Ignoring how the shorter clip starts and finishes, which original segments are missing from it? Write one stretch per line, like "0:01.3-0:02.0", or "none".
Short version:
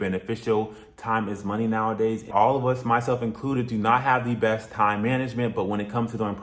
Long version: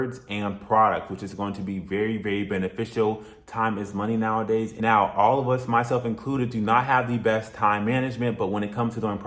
0:04.8-0:05.1

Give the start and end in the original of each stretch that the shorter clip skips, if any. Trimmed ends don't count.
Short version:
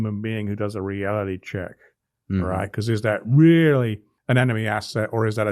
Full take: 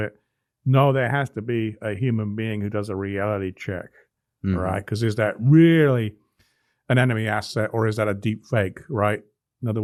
0:06.2-0:06.7

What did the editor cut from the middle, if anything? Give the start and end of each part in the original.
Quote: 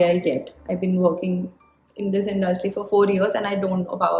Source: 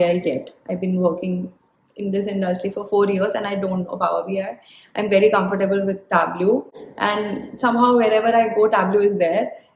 none

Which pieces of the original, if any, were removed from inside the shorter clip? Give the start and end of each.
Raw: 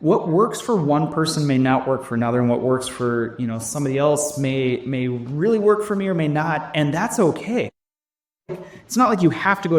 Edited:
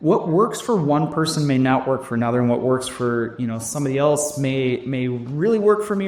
none

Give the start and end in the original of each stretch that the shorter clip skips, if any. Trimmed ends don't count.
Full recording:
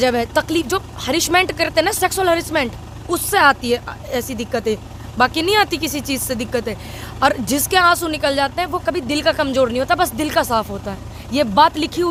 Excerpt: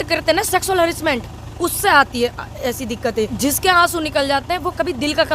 0:04.8-0:07.4

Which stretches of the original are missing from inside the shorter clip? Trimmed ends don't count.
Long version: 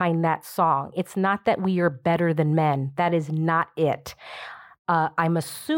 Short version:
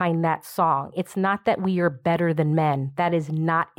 none

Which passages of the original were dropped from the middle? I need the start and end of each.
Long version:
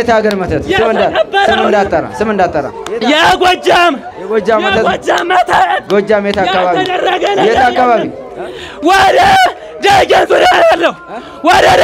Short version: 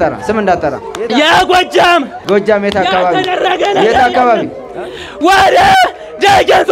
0:04.1-0:05.8

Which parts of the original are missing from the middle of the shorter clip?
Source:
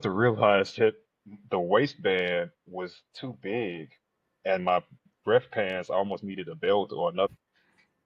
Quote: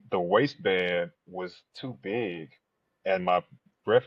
none

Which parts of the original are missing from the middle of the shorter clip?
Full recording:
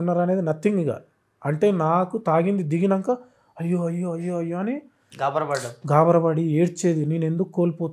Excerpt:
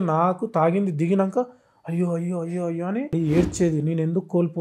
0:04.8-0:06.4

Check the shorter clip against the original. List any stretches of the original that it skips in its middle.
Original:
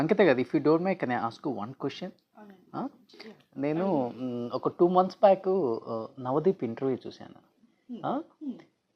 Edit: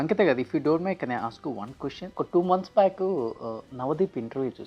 0:02.1-0:04.6

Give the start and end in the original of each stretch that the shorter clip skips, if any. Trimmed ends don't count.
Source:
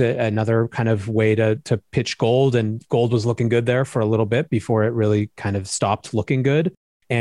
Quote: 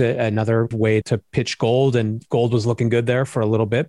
0:00.9-0:01.5

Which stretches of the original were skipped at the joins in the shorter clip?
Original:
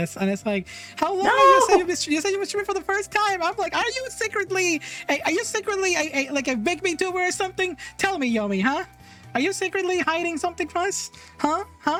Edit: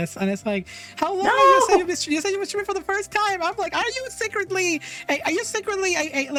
none

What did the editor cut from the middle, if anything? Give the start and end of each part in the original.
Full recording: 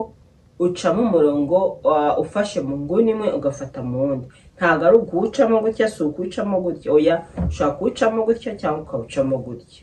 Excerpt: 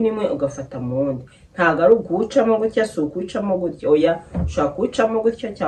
none

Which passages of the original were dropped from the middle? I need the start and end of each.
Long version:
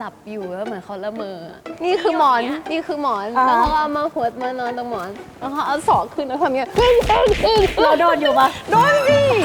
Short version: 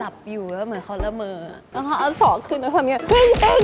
0:01.6-0:05.2

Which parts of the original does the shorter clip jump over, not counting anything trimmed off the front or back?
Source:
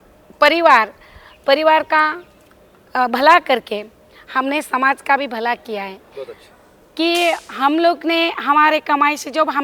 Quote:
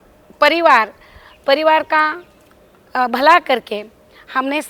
none

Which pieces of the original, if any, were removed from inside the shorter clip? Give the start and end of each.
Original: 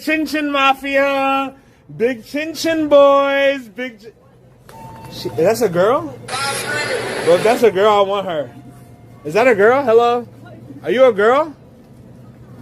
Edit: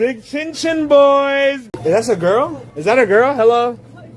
0:03.7-0:05.2
0:06.2-0:09.1

